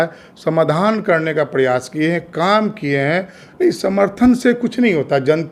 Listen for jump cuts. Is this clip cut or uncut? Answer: cut